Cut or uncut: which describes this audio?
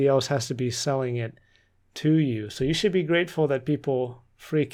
uncut